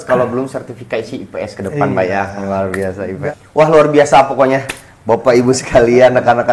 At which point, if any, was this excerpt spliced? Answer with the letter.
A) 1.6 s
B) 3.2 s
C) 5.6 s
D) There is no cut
B